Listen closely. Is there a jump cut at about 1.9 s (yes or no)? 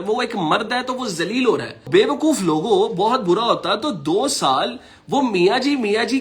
yes